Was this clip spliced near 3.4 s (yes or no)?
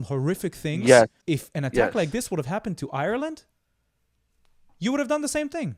no